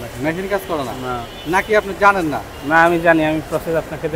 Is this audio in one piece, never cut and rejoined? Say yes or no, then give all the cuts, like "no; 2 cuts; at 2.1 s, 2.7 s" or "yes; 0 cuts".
yes; 0 cuts